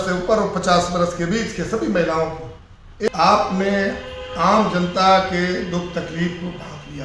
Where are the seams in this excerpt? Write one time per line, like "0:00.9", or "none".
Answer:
0:03.1